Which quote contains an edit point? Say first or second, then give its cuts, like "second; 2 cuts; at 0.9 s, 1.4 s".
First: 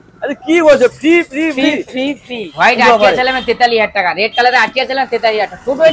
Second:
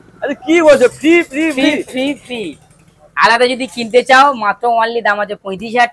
first; 1 cut; at 2.4 s